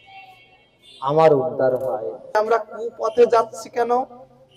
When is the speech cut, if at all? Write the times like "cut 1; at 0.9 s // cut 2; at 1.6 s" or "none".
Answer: cut 1; at 2.4 s

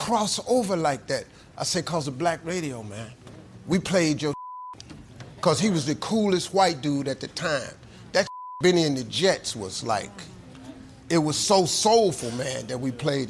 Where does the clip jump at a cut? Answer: none

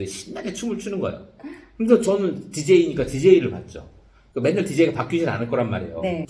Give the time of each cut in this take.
none

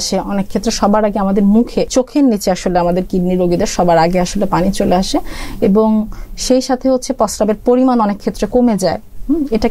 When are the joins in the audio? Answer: cut 1; at 1.9 s

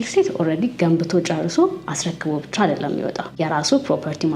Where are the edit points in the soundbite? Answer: cut 1; at 3.2 s

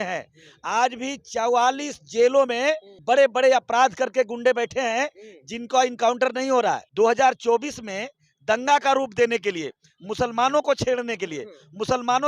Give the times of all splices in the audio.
cut 1; at 3.0 s // cut 2; at 6.8 s

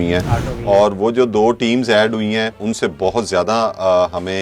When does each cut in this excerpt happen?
cut 1; at 2.6 s

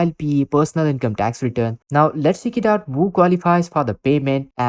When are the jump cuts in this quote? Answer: cut 1; at 1.8 s

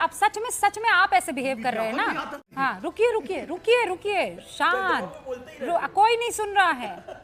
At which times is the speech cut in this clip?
cut 1; at 2.4 s

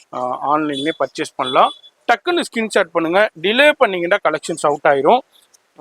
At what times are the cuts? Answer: none

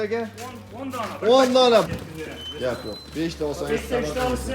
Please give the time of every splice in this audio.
cut 1; at 1.9 s

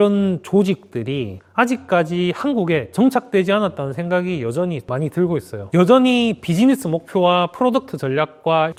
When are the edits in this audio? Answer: none

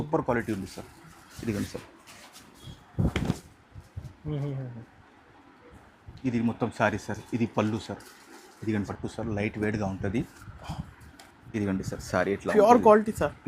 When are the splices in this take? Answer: cut 1; at 8.9 s

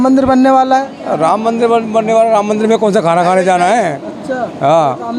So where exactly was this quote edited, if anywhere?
none

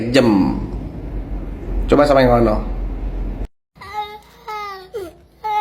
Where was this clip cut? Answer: none

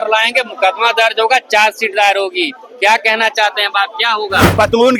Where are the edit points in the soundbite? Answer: none

